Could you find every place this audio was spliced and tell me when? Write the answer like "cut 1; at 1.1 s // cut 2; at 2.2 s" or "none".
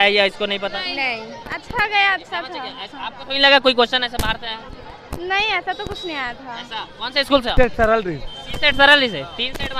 cut 1; at 1.5 s // cut 2; at 7.5 s